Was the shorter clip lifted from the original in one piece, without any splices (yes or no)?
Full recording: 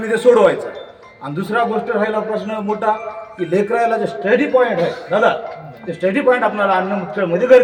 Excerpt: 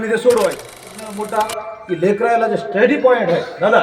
no